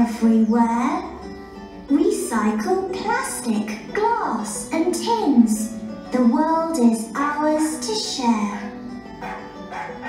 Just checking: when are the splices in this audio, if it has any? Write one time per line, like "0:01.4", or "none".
none